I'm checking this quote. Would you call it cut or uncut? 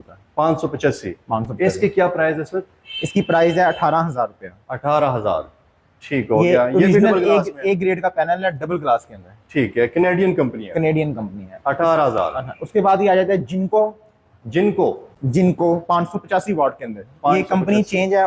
uncut